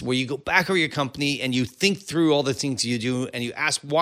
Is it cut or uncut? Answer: uncut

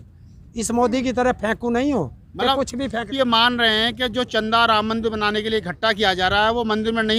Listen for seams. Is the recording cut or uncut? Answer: cut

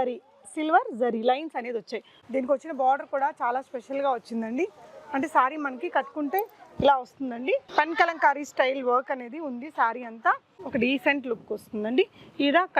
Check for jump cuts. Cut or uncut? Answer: cut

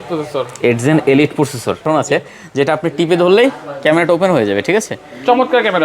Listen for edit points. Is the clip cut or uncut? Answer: cut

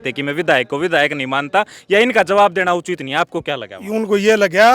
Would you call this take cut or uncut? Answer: uncut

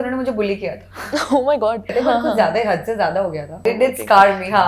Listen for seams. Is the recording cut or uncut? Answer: cut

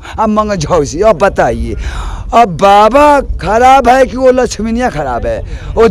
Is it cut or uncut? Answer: uncut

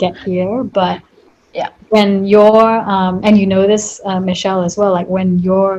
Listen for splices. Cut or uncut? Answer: uncut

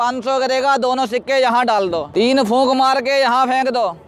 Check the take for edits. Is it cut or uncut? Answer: cut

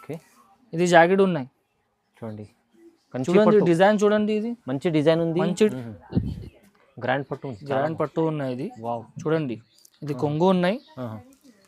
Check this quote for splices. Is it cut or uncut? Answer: cut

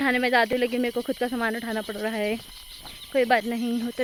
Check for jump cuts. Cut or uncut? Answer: uncut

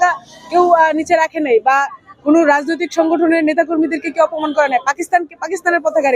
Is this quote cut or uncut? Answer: uncut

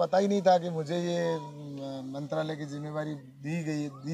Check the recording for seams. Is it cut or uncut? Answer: uncut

